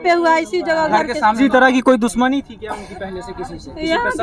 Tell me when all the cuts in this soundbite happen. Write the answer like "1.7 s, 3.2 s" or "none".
1.4 s